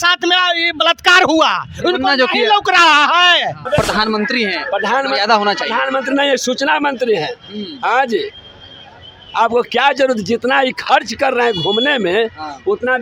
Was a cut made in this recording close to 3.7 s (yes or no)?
yes